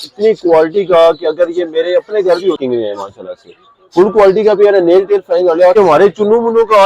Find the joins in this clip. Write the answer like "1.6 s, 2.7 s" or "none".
2.6 s, 5.7 s